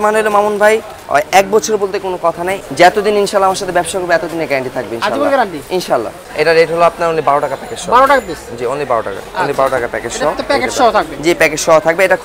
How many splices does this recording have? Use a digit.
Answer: 2